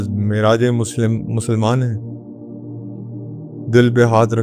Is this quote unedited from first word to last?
no; 2 cuts; at 2.0 s, 3.5 s

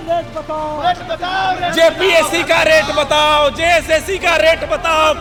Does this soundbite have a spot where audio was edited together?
no; 0 cuts

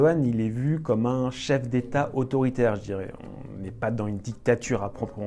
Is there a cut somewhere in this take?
no; 0 cuts

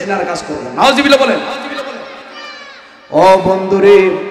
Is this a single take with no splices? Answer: yes; 0 cuts

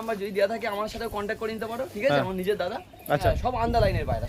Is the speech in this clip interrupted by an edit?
yes; 1 cut; at 3.2 s

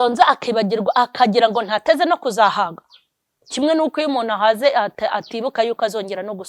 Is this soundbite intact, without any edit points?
yes; 0 cuts

